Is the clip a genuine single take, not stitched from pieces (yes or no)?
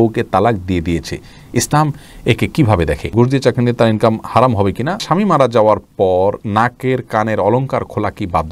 no